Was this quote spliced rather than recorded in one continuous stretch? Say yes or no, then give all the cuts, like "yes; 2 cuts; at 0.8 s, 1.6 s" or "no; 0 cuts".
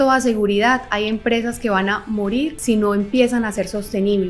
yes; 1 cut; at 2.6 s